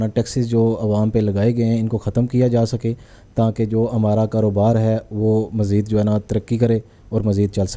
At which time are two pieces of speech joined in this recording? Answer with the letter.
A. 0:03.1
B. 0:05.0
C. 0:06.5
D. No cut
D